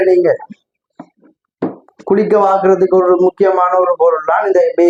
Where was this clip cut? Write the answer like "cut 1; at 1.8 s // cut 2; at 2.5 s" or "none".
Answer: none